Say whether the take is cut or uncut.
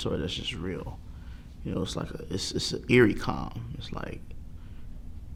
uncut